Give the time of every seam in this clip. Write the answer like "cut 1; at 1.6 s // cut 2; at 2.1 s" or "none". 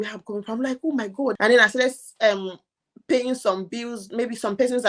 cut 1; at 1.3 s